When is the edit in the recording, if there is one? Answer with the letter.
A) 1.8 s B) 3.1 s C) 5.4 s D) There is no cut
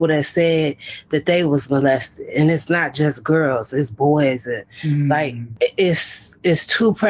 C